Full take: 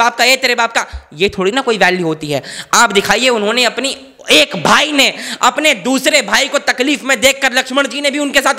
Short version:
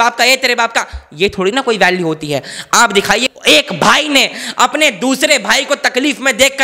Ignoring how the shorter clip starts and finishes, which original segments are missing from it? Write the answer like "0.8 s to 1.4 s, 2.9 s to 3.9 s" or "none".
3.2 s to 4.1 s